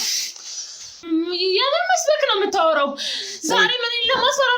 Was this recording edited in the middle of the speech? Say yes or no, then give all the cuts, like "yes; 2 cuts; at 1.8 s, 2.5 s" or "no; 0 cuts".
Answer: yes; 1 cut; at 1.1 s